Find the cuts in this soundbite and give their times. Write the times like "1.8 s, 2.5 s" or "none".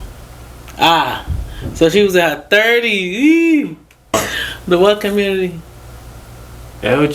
4.1 s